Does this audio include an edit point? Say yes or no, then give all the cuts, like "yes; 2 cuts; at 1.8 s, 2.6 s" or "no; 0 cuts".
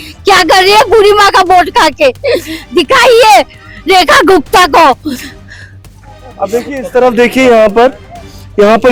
no; 0 cuts